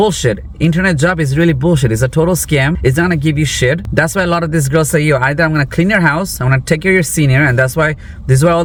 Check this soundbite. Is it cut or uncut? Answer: uncut